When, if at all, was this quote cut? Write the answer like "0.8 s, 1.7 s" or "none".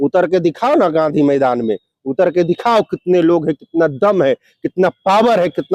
none